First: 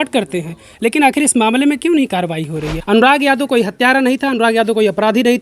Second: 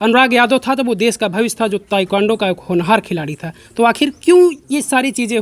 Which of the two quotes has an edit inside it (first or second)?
first